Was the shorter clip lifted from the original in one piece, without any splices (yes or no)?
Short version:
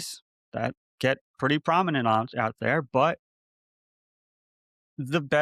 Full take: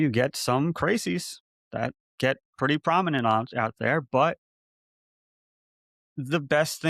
yes